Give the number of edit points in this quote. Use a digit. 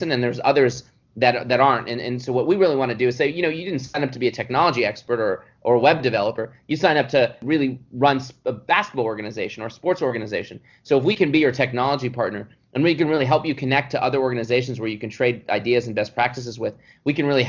1